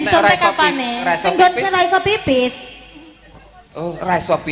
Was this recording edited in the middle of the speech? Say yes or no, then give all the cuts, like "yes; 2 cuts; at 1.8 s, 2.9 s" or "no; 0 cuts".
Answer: no; 0 cuts